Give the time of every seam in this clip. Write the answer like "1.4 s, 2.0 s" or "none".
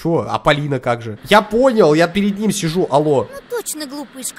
1.1 s